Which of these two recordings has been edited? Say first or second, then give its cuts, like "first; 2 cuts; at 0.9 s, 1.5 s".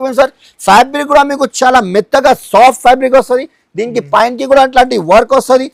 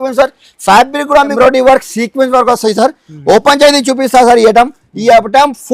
second; 1 cut; at 1.3 s